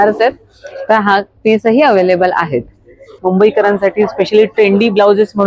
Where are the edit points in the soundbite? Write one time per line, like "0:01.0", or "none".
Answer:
0:03.2